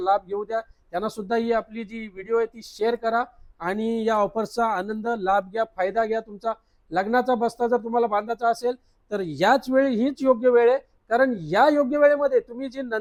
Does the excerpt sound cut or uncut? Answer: uncut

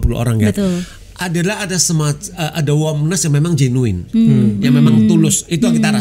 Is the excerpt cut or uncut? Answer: cut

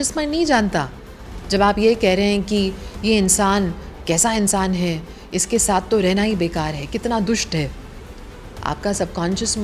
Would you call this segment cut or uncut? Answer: uncut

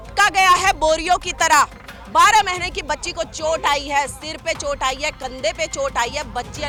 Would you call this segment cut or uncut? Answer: uncut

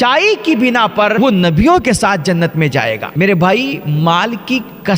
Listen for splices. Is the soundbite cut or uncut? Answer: cut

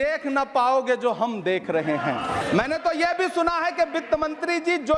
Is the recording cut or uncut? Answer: cut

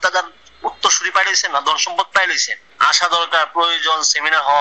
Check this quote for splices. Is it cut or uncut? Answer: cut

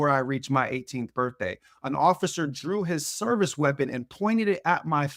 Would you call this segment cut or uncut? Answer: uncut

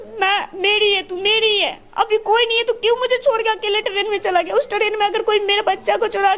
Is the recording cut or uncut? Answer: uncut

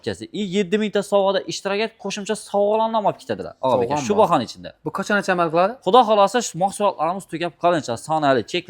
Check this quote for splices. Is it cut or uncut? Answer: uncut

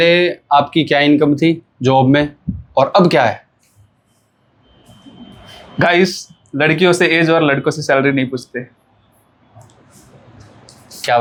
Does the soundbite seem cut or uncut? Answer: uncut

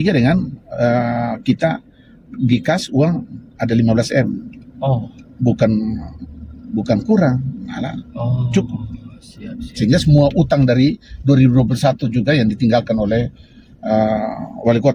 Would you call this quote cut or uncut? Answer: uncut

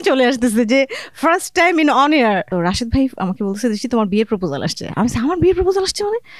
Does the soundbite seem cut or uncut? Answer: cut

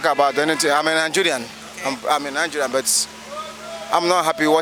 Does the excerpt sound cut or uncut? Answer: uncut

